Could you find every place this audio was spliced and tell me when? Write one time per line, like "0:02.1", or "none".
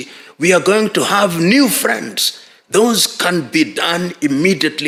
none